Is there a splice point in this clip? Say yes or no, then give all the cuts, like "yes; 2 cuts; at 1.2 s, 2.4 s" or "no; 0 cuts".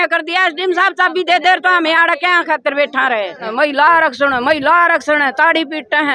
yes; 1 cut; at 3.4 s